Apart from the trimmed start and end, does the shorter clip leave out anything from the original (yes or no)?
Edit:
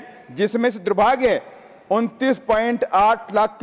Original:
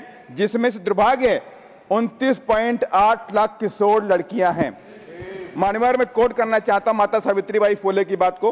no